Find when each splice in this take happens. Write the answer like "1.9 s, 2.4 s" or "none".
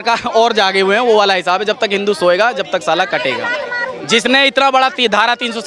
none